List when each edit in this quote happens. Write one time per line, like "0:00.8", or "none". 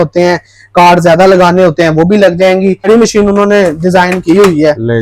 0:02.9